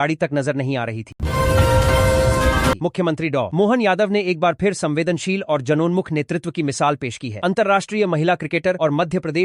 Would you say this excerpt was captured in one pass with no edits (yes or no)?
no